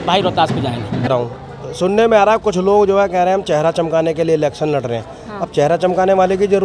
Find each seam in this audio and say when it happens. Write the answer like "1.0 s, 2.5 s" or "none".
1.1 s